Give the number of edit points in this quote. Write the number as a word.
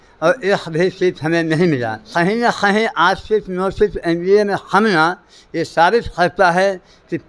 one